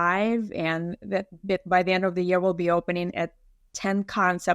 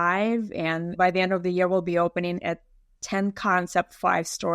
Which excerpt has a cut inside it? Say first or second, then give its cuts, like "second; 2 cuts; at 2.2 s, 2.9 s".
second; 1 cut; at 0.9 s